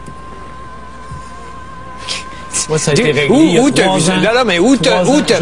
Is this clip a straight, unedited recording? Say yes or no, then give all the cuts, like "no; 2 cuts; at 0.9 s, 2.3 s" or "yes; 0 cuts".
yes; 0 cuts